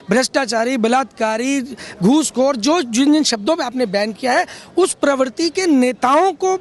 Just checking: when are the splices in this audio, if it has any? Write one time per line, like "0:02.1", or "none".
none

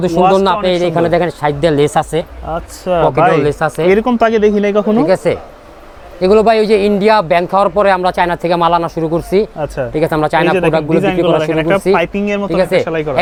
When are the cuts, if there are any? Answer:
none

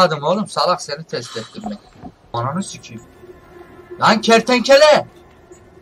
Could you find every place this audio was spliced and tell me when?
0:02.3

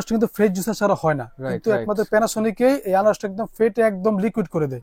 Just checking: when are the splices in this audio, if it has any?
none

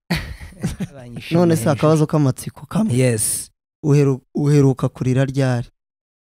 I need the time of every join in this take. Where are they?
0:01.2

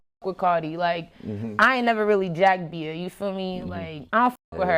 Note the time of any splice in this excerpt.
none

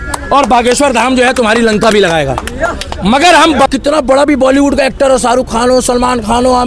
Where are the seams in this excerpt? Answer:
0:03.7

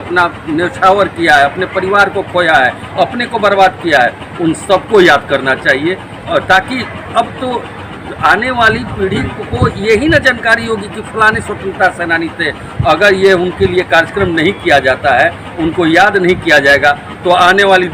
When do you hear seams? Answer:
none

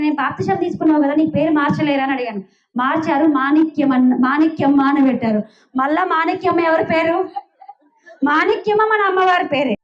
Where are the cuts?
none

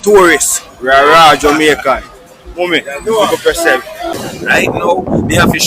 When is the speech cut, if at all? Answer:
0:04.2

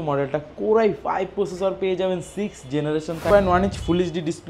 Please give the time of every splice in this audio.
0:03.3

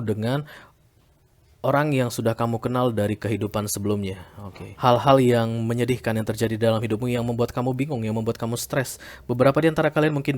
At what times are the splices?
0:04.6

